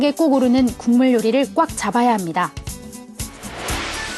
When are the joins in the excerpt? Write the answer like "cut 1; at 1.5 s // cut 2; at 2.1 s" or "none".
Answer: none